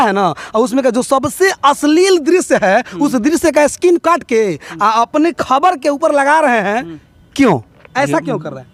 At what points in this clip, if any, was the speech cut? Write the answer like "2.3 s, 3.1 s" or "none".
none